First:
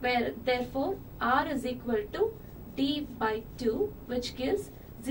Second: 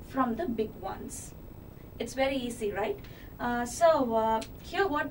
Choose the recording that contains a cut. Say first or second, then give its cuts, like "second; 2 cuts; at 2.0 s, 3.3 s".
first; 1 cut; at 1.1 s